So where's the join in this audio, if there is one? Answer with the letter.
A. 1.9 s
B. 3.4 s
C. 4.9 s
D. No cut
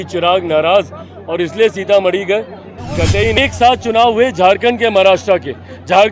B